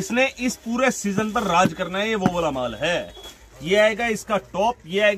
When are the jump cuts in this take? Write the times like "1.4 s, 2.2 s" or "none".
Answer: none